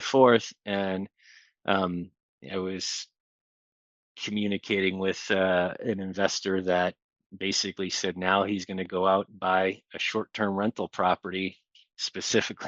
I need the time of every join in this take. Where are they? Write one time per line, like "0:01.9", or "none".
none